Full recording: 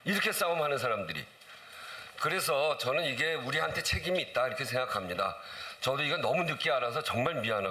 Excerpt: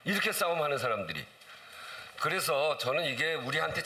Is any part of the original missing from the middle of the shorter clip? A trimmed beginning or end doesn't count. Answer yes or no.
no